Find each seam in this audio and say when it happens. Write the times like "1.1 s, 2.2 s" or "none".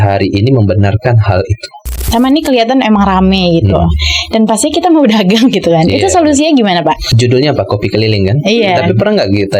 2.0 s, 7.1 s